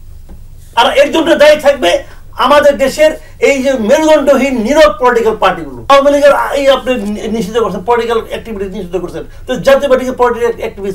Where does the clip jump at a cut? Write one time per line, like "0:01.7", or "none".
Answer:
0:05.7